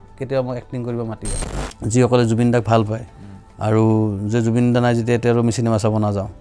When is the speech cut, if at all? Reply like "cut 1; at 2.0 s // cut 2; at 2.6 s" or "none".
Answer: cut 1; at 1.3 s